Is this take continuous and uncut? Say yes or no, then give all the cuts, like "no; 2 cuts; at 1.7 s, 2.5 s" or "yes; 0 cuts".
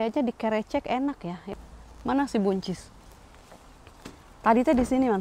no; 1 cut; at 1.5 s